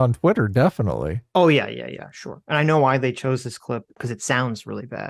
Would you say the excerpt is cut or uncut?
cut